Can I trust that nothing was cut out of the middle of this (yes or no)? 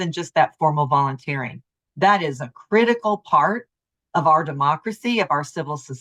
yes